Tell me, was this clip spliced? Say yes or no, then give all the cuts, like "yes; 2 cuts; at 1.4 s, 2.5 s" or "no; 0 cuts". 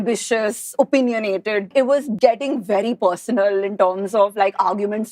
yes; 1 cut; at 1.8 s